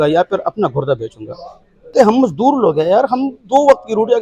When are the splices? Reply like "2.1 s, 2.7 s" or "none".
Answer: 1.9 s

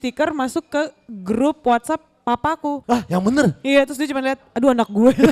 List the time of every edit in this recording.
2.8 s

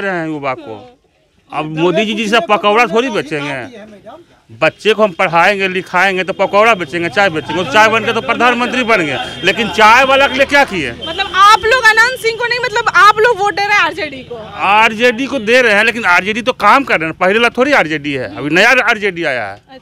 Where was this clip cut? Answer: none

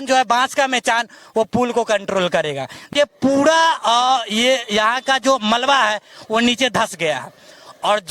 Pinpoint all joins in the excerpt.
2.9 s

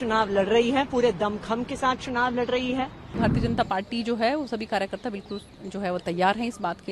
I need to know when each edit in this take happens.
3.2 s

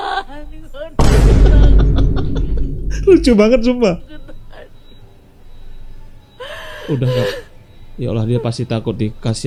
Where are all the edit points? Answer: none

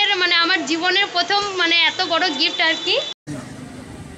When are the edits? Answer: 3.2 s

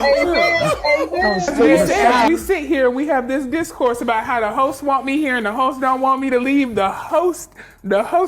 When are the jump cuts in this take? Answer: 2.3 s

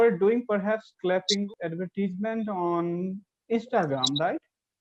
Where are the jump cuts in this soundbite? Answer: 1.4 s

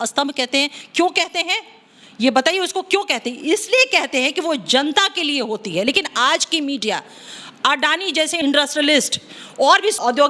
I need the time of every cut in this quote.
none

